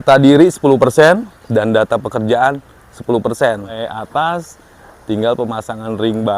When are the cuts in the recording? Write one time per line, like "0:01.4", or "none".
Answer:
0:03.7